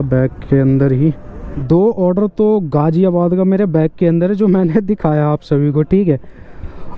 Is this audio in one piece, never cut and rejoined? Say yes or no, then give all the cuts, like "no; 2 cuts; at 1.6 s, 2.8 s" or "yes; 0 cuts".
no; 1 cut; at 1.5 s